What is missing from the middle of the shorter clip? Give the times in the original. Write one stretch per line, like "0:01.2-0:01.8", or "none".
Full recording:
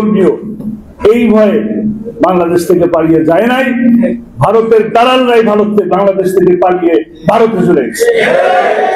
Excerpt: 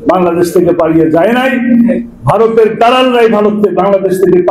none